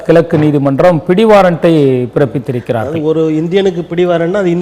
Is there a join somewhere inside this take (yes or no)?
no